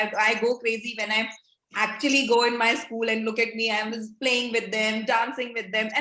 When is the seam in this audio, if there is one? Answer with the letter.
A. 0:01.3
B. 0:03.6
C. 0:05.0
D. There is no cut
D